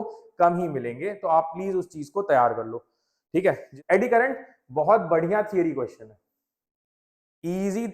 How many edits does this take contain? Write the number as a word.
one